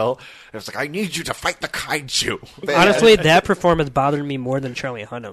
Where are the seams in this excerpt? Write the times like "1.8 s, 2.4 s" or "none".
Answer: 2.6 s

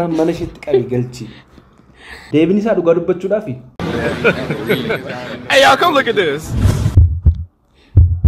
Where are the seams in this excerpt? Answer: 2.2 s

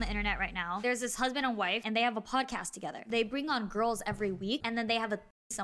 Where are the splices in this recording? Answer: 0.8 s, 1.8 s, 3.0 s, 4.6 s

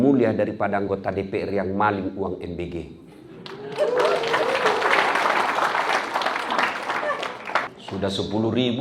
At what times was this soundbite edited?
7.8 s

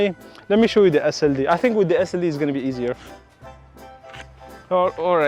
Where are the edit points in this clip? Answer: none

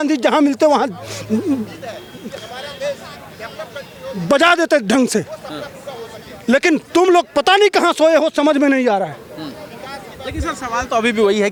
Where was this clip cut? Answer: none

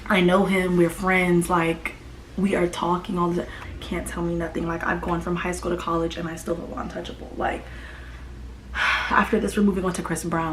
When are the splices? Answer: 3.6 s

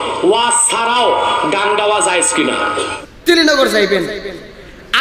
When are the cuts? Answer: 2.9 s

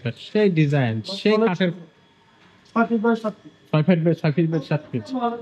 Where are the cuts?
none

